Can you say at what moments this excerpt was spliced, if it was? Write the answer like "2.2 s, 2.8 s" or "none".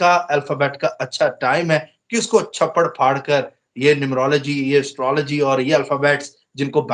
none